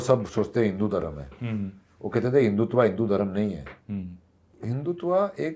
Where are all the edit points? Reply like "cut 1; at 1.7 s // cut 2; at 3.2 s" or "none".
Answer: cut 1; at 4.5 s